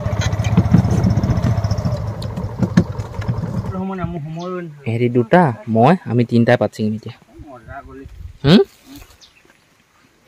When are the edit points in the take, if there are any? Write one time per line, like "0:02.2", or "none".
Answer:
0:03.7

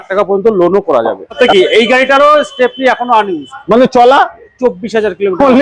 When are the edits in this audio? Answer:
0:01.4

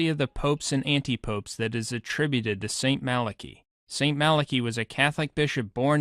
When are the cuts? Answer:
0:03.6

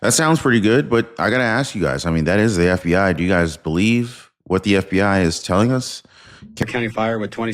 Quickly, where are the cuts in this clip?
0:06.6

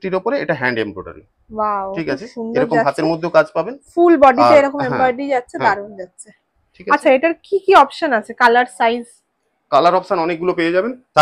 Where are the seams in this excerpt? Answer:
none

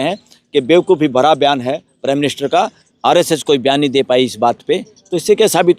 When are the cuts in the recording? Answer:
0:02.8

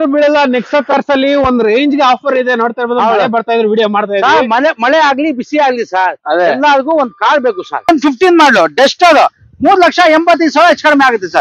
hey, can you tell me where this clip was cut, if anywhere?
0:07.9

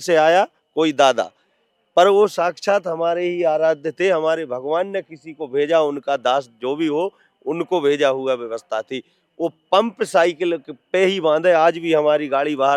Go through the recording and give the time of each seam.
none

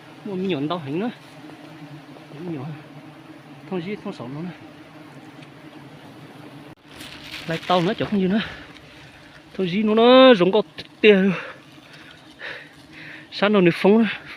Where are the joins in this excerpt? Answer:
0:06.8

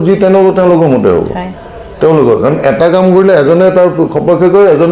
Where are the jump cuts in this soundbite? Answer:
none

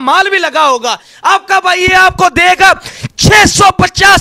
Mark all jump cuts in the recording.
none

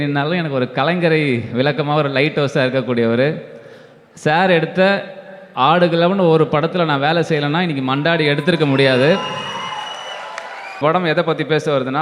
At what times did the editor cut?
0:10.8

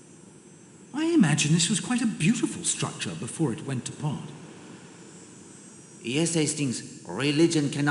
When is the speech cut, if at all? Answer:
0:00.9
0:04.3
0:06.0

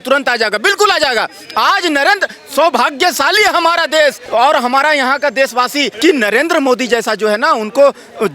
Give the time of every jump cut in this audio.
0:04.2
0:05.9

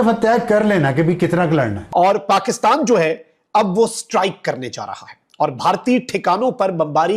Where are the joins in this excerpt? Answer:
0:01.8

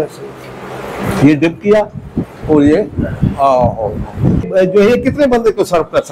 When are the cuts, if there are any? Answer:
0:04.5

